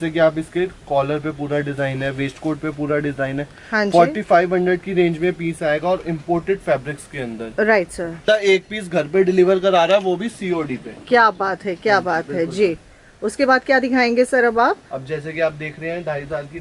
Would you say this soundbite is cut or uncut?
cut